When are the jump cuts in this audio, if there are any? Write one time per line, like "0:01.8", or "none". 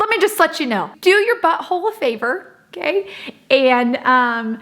0:00.9